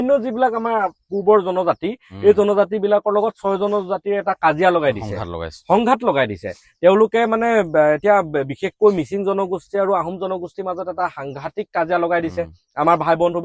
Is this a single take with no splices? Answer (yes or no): yes